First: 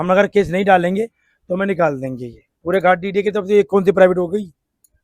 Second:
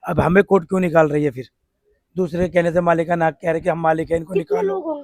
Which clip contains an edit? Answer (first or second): first